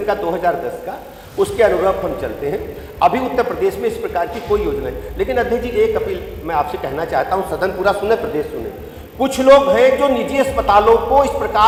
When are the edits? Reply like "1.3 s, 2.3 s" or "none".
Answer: none